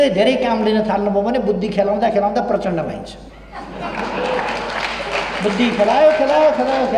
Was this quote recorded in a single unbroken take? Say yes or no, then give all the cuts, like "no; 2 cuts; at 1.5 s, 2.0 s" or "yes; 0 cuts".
yes; 0 cuts